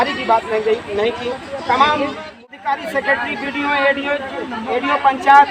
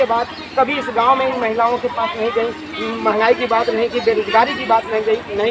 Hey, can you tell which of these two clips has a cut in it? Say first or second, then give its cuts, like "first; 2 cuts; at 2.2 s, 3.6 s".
first; 1 cut; at 2.5 s